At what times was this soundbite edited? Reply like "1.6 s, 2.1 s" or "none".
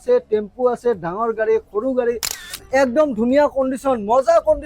2.5 s